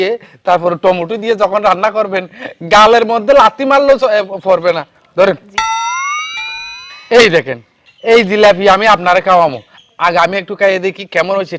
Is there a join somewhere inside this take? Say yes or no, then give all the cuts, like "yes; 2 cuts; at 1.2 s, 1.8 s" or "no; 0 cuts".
no; 0 cuts